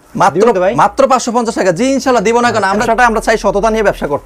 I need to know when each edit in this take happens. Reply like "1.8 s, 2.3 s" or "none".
2.8 s

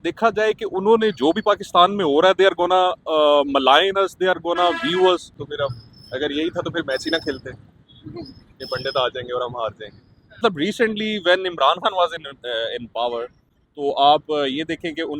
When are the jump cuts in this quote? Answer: 5.4 s, 10.4 s

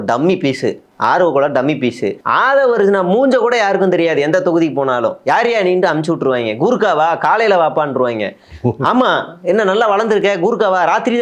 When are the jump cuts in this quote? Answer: 2.1 s

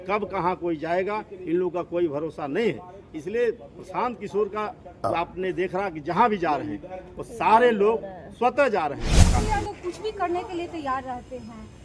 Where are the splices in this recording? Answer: 9.3 s

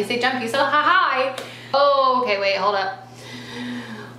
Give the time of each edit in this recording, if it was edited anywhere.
1.7 s

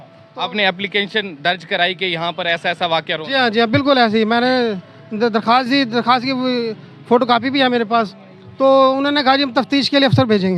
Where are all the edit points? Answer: none

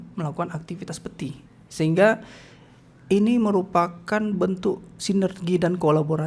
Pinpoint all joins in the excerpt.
none

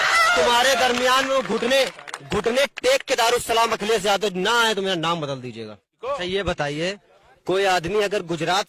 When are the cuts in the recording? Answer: 5.9 s

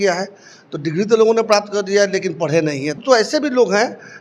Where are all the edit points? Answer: 3.0 s

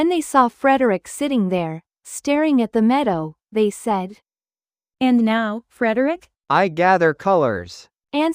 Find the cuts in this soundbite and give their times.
6.4 s

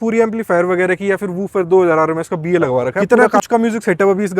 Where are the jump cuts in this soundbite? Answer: 3.0 s

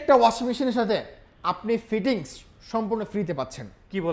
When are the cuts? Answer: none

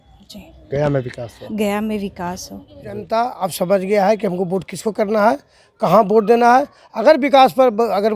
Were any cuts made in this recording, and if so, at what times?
3.1 s

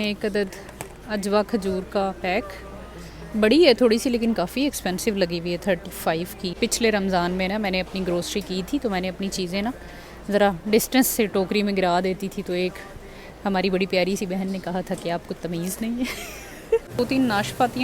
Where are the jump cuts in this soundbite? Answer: 6.5 s, 16.9 s

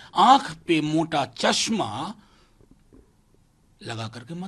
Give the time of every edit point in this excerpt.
none

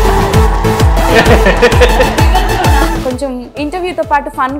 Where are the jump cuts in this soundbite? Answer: 3.0 s

